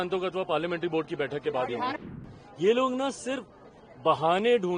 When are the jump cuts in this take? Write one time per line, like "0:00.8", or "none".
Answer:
0:02.0